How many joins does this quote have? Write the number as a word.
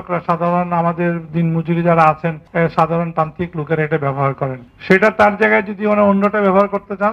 two